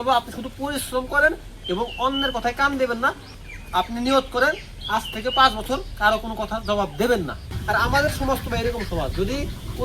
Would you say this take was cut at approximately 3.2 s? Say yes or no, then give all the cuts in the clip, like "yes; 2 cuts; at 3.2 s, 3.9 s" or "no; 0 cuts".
yes; 2 cuts; at 3.2 s, 7.5 s